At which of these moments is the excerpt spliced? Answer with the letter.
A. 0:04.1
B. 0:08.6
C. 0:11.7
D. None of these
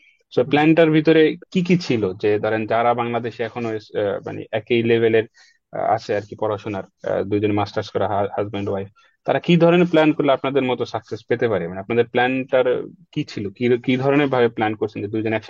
D